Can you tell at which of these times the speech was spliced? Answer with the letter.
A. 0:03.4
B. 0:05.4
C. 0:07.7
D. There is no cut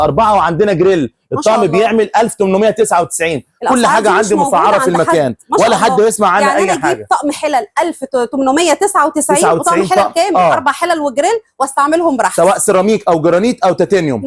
D